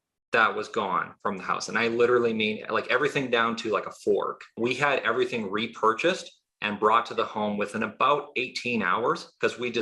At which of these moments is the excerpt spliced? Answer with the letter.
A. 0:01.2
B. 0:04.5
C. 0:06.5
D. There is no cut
B